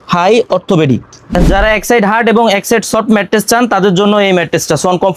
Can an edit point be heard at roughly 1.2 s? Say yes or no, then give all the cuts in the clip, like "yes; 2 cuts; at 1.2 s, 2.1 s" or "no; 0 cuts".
yes; 1 cut; at 1.2 s